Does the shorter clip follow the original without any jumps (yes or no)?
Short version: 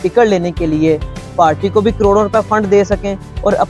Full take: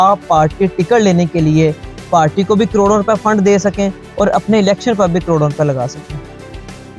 yes